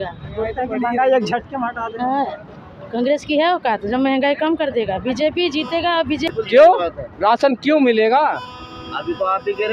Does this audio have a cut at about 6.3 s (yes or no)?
yes